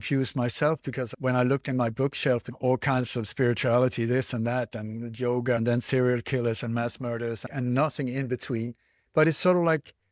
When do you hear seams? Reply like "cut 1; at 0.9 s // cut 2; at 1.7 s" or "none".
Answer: cut 1; at 1.1 s // cut 2; at 2.5 s // cut 3; at 5.6 s // cut 4; at 7.4 s // cut 5; at 9.0 s